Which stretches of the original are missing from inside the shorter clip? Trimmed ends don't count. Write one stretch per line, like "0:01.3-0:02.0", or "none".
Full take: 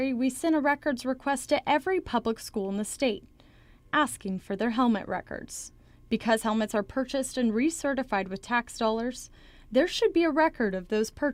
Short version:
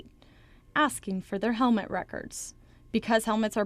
none